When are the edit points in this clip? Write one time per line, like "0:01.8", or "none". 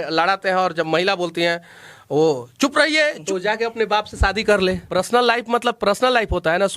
0:03.2
0:04.8